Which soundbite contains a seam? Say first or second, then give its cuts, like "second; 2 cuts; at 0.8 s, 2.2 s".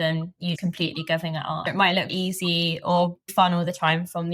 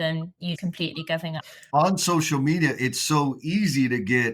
first; 1 cut; at 1.7 s